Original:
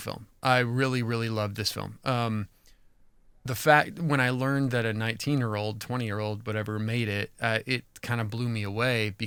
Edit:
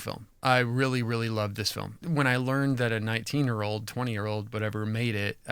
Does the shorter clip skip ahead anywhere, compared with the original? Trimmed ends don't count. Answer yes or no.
yes